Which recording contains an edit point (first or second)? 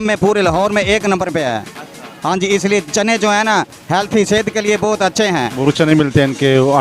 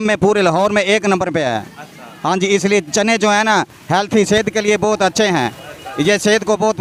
first